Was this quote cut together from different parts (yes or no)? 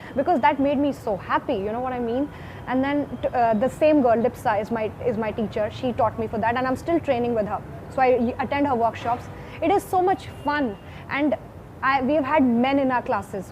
no